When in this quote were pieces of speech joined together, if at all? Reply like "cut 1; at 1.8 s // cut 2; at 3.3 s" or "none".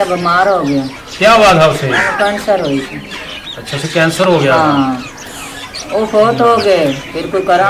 none